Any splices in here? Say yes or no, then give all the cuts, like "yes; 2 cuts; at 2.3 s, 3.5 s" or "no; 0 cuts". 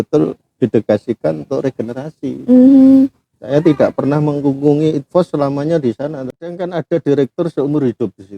yes; 1 cut; at 6.5 s